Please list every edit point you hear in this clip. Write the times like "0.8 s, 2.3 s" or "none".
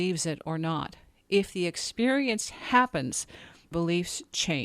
3.7 s